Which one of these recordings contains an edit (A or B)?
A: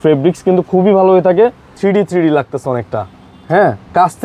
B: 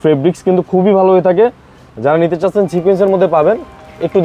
A